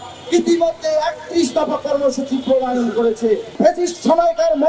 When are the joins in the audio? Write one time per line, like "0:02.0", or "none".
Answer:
0:03.6